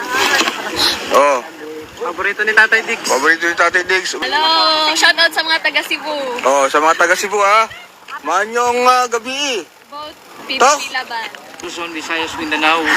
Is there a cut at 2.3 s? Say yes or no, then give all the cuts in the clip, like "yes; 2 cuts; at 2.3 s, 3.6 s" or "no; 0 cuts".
no; 2 cuts; at 4.2 s, 11.7 s